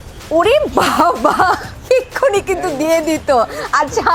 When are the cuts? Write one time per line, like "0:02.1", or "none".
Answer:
none